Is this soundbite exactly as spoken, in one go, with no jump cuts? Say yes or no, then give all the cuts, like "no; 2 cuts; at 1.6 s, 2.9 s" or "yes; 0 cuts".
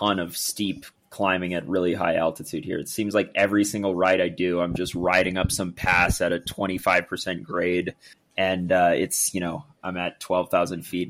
yes; 0 cuts